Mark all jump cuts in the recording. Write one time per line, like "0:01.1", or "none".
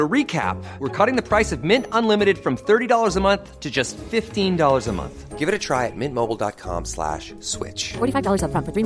none